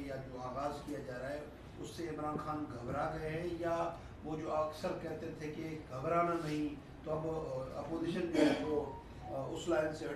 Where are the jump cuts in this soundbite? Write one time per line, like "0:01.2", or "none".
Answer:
0:06.1